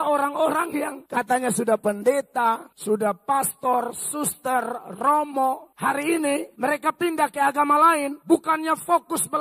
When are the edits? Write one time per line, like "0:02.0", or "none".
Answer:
0:01.0
0:02.7
0:05.7
0:06.5
0:08.1

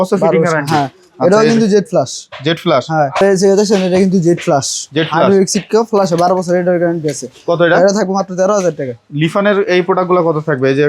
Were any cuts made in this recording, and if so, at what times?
0:03.2

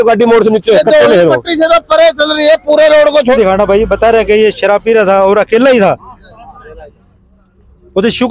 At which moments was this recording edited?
0:03.4

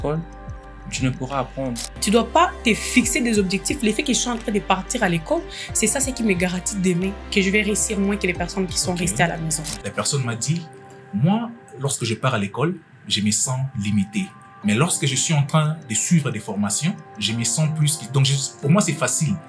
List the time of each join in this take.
0:02.0
0:09.7

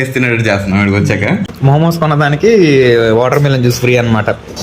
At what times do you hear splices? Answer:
0:01.4

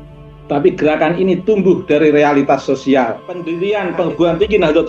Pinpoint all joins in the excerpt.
0:03.5

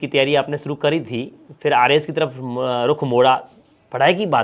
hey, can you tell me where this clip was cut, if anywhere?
none

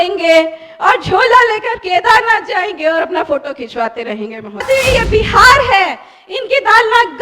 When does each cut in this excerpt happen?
0:04.6

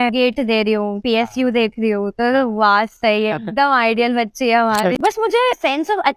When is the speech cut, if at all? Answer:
0:05.0

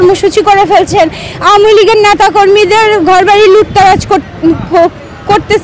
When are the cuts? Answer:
0:01.0

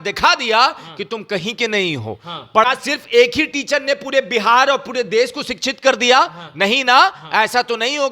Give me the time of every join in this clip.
0:02.6

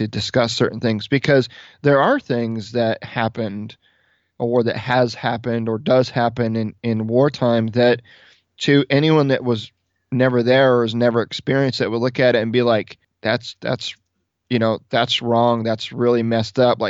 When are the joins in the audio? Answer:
0:13.0

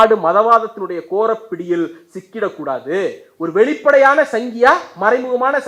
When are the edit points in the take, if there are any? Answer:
none

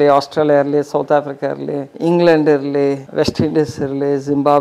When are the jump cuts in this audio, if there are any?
0:01.9
0:03.0

